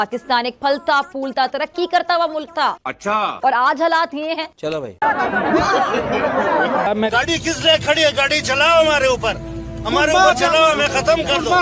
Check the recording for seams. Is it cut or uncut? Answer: uncut